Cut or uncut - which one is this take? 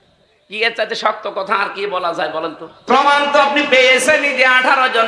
cut